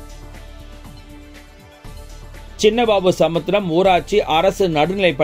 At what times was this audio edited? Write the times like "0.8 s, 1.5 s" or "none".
2.3 s